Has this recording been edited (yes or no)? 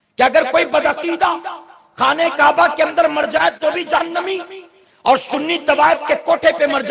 no